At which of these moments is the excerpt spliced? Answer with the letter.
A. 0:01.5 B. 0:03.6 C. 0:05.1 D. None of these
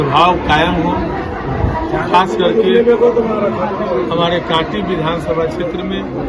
D